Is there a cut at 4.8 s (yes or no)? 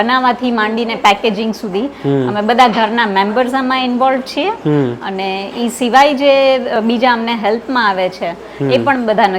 no